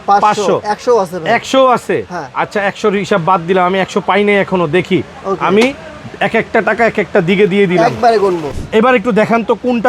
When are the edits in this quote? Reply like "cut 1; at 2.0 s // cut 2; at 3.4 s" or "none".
cut 1; at 8.5 s